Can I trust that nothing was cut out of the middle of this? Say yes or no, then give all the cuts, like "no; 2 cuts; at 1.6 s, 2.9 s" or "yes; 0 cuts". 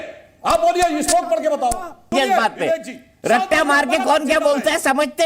no; 1 cut; at 2.1 s